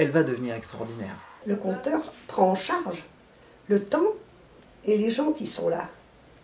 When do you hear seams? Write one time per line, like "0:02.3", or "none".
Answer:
0:01.3